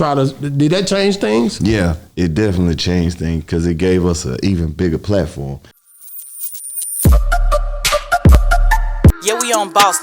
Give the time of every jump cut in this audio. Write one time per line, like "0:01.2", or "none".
0:05.7